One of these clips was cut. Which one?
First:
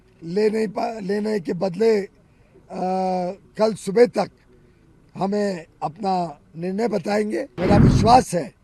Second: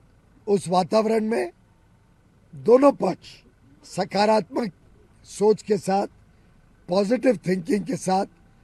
first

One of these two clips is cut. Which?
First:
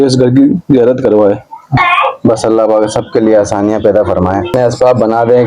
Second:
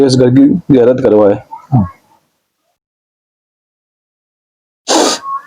first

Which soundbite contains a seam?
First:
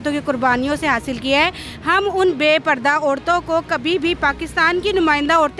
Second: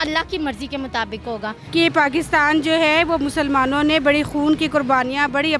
second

